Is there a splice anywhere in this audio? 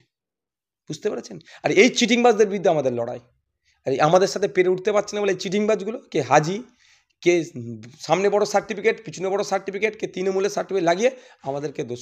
no; 0 cuts

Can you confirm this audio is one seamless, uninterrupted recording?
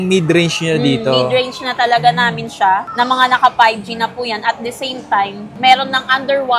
yes; 0 cuts

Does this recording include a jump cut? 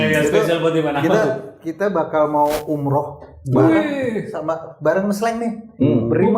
no; 0 cuts

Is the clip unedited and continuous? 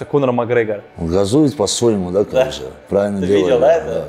no; 1 cut; at 0.9 s

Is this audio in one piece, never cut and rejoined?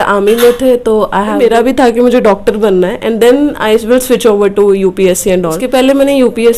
no; 2 cuts; at 1.4 s, 5.6 s

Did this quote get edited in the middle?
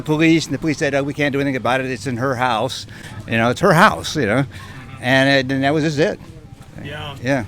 no; 0 cuts

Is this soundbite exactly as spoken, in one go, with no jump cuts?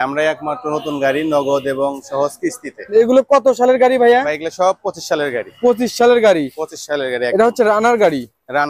no; 1 cut; at 2.8 s

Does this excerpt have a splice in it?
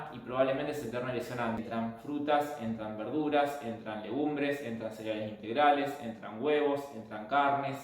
yes; 1 cut; at 1.6 s

